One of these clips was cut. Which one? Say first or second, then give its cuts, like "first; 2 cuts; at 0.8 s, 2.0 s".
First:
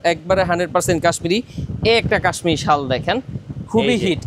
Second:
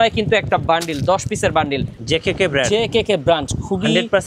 second; 1 cut; at 1.9 s